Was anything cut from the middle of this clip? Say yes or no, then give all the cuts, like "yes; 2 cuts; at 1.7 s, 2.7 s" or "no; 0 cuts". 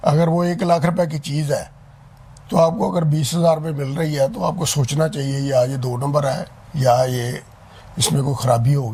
no; 0 cuts